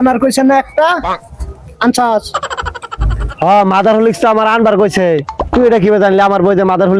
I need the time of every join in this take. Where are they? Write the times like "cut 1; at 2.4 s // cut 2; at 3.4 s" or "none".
none